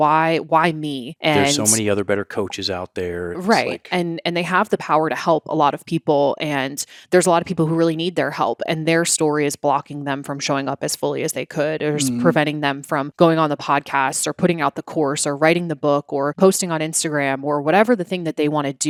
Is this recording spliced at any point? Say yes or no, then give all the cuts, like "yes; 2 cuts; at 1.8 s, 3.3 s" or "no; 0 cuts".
no; 0 cuts